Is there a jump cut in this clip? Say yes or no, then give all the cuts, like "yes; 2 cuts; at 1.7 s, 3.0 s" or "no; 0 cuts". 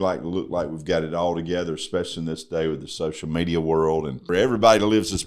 yes; 1 cut; at 4.2 s